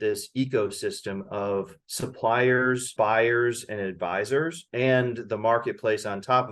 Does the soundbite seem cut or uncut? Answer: cut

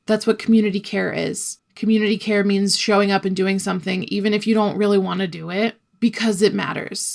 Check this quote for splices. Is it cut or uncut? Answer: uncut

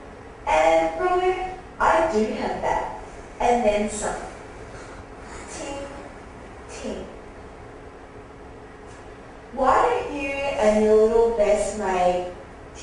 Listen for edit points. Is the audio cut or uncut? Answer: uncut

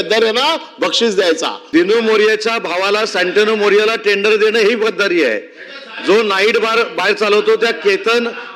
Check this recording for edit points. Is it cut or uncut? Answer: cut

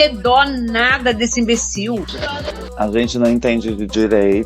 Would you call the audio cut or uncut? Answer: cut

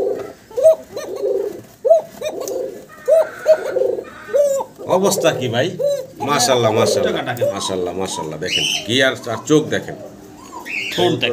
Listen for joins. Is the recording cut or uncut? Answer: cut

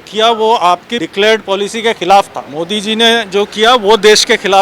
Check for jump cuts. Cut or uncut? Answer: cut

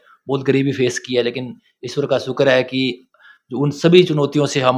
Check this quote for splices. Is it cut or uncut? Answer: uncut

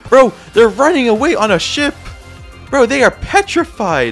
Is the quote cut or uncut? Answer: uncut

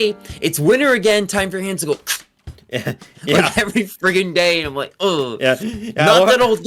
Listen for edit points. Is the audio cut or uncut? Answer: uncut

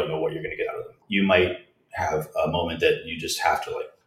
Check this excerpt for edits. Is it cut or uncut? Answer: cut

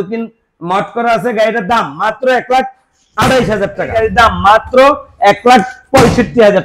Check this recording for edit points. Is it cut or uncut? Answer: cut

